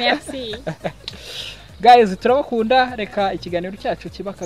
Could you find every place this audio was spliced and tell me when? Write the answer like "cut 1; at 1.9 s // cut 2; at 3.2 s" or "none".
none